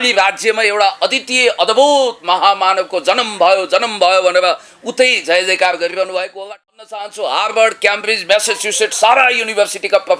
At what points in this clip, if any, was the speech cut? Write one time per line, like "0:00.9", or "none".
0:07.1